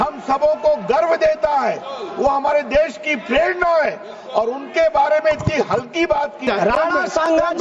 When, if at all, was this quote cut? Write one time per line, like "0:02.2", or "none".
0:06.4